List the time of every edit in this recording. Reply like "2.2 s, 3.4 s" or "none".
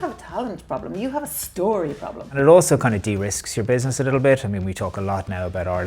2.3 s